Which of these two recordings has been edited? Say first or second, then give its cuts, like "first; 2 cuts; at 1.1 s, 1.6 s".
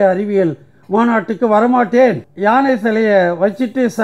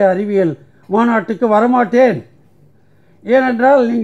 first; 1 cut; at 2.3 s